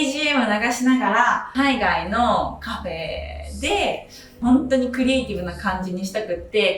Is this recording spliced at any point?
yes; 2 cuts; at 1.5 s, 4.2 s

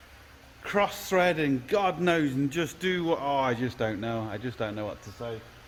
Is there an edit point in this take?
no; 0 cuts

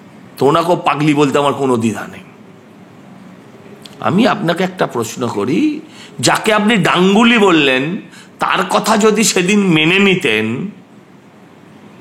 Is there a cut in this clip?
no; 0 cuts

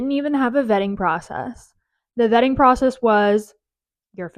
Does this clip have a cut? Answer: no; 0 cuts

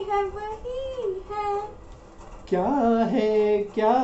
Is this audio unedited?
yes; 0 cuts

